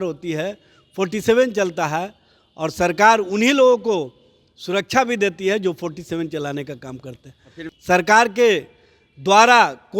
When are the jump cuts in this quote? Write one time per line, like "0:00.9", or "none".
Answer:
0:07.5